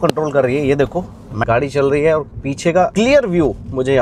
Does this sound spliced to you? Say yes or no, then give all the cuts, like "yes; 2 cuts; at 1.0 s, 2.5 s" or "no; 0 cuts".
yes; 2 cuts; at 1.4 s, 2.9 s